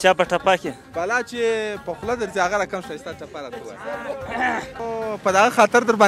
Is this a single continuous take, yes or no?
no